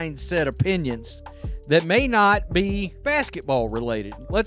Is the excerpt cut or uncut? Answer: cut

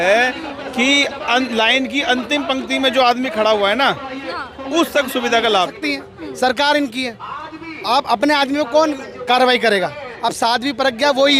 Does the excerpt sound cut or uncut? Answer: cut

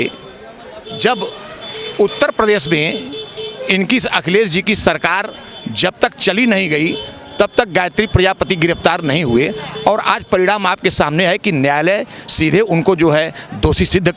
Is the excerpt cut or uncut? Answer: uncut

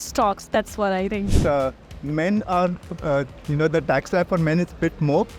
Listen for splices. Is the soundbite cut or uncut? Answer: cut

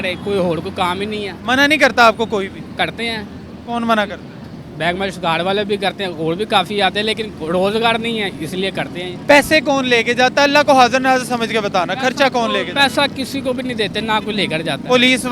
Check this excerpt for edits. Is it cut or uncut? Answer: uncut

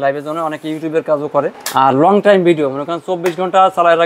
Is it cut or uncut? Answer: cut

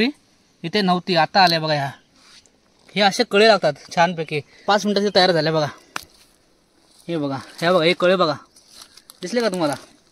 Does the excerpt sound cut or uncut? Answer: cut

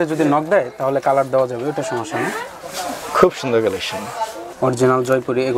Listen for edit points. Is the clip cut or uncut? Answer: cut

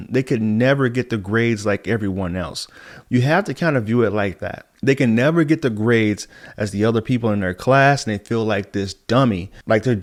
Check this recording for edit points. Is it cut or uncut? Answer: uncut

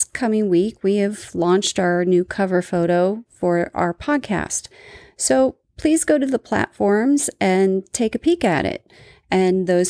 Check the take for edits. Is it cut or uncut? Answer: uncut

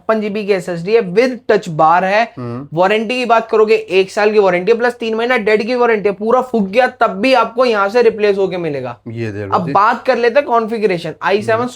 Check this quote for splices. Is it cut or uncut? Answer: uncut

